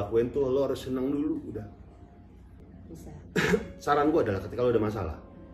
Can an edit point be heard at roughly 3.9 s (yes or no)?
no